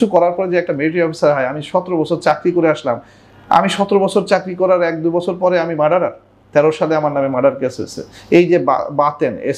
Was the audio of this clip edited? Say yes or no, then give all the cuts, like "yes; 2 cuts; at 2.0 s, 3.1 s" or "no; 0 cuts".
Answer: no; 0 cuts